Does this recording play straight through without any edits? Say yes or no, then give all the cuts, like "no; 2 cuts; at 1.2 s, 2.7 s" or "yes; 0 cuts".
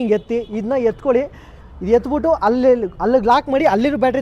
yes; 0 cuts